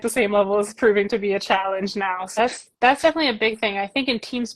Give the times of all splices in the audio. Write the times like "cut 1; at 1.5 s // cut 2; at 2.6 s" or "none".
cut 1; at 2.4 s